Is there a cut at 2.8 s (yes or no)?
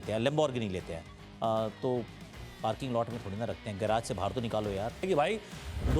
no